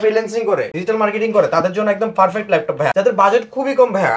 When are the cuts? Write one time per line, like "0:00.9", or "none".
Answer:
none